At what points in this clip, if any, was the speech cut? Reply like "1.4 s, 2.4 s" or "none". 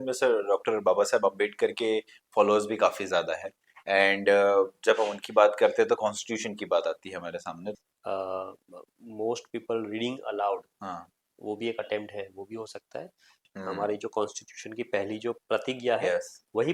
7.7 s, 13.5 s

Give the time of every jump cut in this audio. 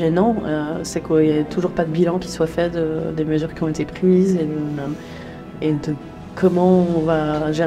none

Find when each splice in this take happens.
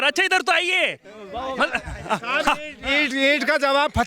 none

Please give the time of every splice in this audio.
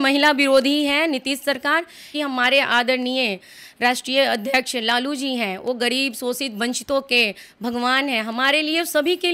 2.1 s

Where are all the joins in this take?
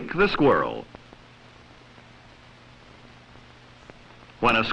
2.4 s

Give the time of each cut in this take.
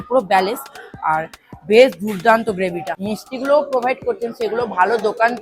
3.1 s

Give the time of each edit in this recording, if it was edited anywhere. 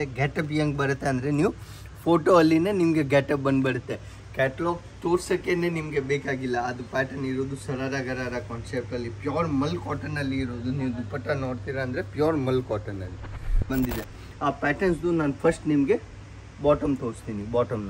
13.7 s

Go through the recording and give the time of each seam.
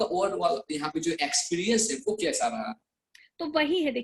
none

